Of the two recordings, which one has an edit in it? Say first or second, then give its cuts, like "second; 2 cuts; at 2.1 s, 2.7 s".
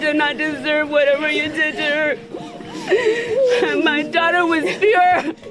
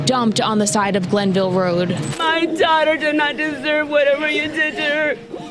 second; 1 cut; at 2.1 s